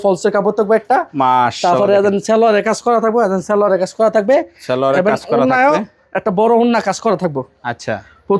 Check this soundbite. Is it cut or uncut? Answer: uncut